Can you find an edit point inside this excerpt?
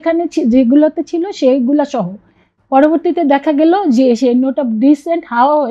no; 0 cuts

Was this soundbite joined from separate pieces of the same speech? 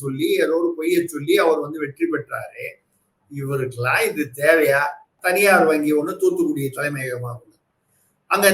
yes; 1 cut; at 5.1 s

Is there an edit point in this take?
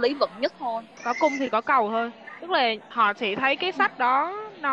yes; 2 cuts; at 1.0 s, 2.8 s

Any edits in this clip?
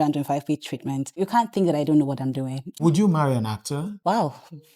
yes; 3 cuts; at 1.2 s, 2.8 s, 4.0 s

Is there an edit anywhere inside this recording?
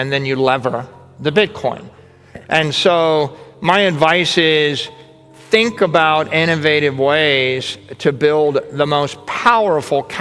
no; 0 cuts

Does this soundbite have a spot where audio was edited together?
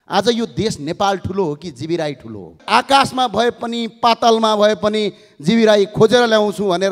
yes; 1 cut; at 2.6 s

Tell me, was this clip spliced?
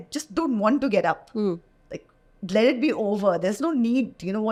no; 0 cuts

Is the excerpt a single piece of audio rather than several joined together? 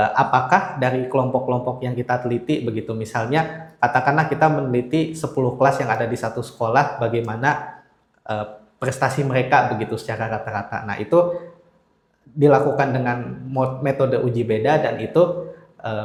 yes; 0 cuts

